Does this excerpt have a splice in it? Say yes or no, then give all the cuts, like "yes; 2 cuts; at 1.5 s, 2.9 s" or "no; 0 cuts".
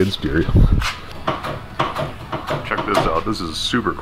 yes; 1 cut; at 1.1 s